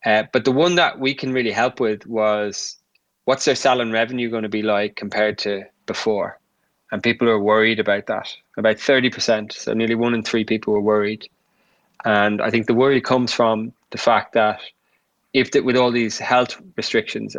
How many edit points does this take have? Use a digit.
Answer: 0